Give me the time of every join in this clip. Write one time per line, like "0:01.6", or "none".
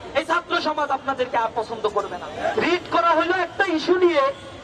0:02.5